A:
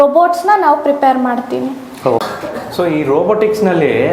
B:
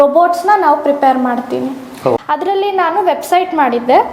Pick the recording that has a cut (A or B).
B